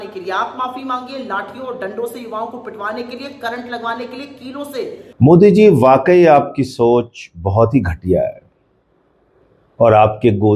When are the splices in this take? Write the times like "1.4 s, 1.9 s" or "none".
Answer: 5.0 s